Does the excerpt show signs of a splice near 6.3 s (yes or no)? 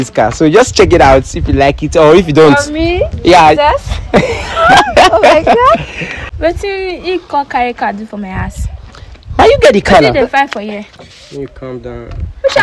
yes